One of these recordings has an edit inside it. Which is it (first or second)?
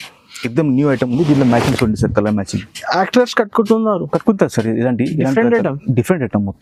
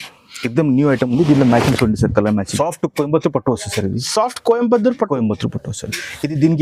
second